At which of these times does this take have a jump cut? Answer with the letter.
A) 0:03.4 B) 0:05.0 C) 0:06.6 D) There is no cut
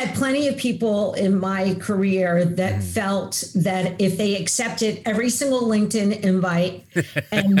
D